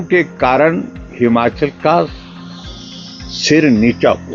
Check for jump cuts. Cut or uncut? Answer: uncut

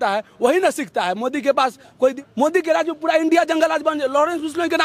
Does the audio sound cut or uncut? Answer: cut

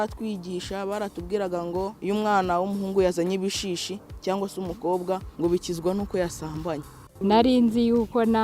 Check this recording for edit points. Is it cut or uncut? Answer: cut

